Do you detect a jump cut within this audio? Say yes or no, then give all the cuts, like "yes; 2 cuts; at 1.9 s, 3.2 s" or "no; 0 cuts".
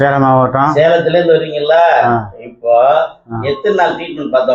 no; 0 cuts